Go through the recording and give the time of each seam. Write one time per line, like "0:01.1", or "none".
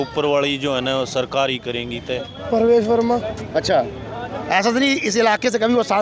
0:02.2